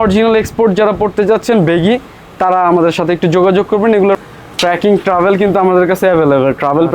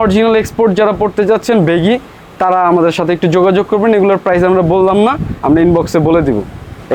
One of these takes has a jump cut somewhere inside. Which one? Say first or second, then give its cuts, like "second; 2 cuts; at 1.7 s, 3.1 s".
first; 1 cut; at 4.2 s